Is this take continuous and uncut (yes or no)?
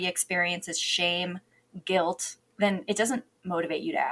yes